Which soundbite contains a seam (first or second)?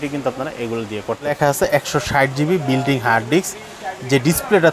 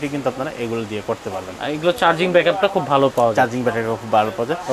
first